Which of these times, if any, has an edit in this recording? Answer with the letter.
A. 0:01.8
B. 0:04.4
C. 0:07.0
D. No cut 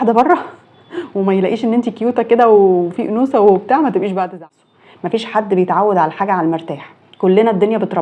B